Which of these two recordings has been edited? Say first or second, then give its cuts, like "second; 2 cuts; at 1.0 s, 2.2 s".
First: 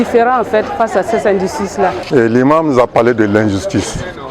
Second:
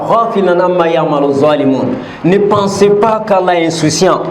first; 1 cut; at 2.0 s